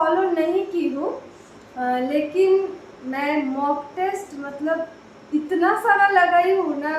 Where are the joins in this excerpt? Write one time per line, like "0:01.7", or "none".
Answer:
none